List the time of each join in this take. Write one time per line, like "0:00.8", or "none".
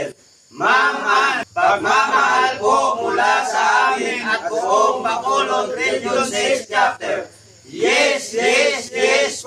0:01.4